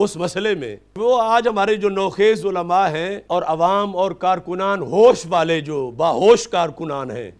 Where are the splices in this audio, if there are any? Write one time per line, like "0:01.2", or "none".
0:01.0
0:03.1